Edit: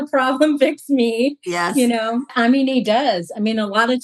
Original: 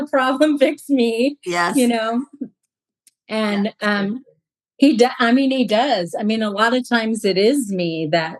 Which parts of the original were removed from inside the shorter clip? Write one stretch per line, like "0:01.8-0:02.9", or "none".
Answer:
0:02.3-0:05.1